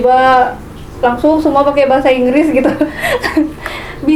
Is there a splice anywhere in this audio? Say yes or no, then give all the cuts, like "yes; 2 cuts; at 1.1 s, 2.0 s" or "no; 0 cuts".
no; 0 cuts